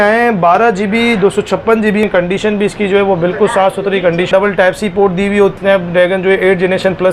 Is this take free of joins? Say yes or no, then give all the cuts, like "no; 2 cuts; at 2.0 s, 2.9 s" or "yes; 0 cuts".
no; 3 cuts; at 2.1 s, 4.3 s, 5.6 s